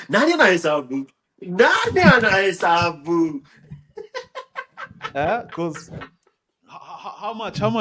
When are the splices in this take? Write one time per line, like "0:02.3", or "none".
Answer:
none